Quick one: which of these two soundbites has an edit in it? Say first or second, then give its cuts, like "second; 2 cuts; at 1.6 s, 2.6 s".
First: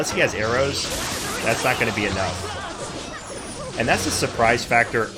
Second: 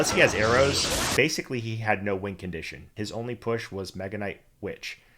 second; 2 cuts; at 1.1 s, 2.9 s